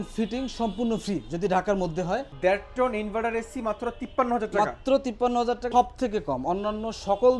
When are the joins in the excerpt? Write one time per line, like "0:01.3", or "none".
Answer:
0:02.3
0:05.7

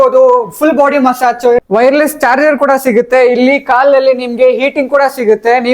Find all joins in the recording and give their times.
0:01.6

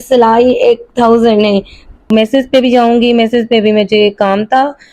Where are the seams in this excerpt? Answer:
0:02.1

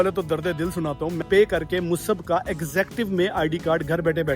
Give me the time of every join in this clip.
0:01.2

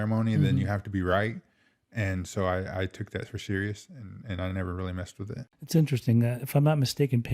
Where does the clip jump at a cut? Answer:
0:05.5

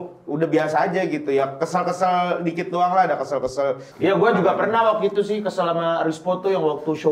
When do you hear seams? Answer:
0:03.9

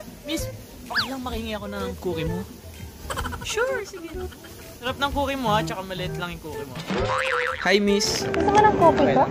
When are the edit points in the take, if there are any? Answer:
0:04.8
0:07.5

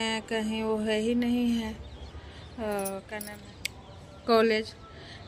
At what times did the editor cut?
0:03.2

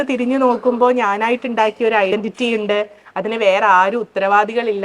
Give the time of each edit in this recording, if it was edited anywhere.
0:02.1

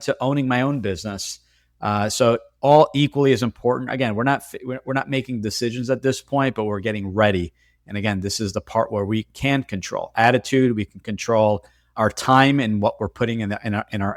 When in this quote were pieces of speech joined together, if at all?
none

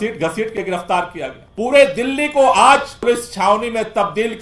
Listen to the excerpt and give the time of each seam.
0:01.4
0:03.0

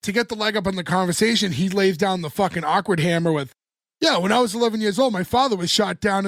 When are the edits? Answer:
none

